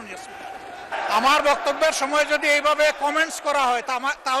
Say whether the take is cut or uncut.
cut